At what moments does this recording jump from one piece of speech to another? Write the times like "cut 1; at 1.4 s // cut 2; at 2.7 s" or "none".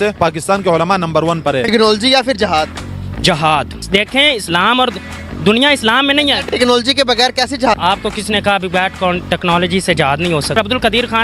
cut 1; at 1.7 s